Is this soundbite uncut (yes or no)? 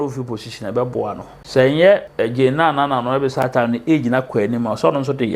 no